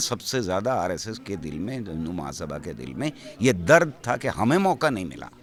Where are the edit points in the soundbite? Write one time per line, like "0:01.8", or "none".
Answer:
none